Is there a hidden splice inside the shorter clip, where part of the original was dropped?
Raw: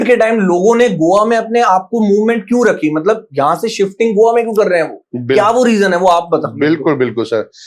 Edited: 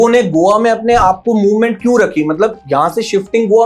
no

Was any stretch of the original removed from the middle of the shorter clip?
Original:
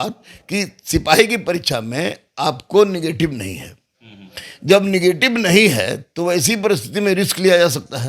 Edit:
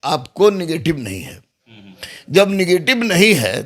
no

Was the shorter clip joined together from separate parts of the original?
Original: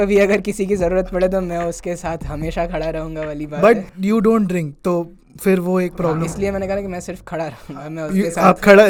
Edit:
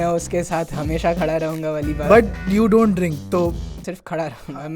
yes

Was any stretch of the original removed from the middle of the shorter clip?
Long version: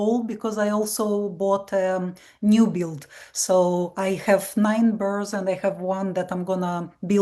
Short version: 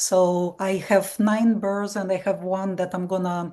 no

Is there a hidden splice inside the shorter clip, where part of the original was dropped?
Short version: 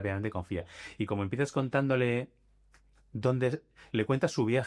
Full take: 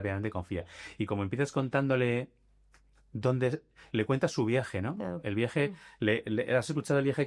no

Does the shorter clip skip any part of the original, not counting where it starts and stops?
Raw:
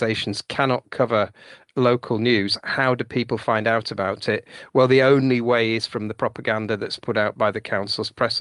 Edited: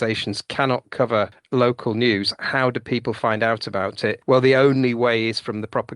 yes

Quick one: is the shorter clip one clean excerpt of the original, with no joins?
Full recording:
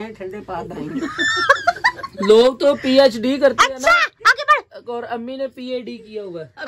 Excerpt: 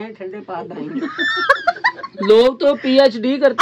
yes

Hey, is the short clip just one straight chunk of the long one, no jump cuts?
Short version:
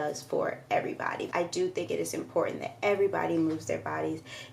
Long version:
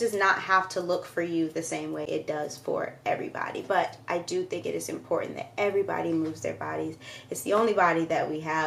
no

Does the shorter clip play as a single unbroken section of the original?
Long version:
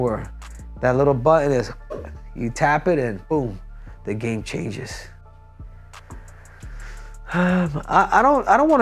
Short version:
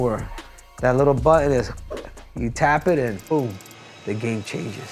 yes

